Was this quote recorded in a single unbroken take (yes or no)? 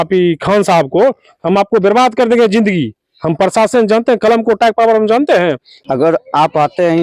no